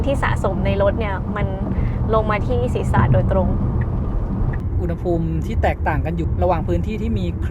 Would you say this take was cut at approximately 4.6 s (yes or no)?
yes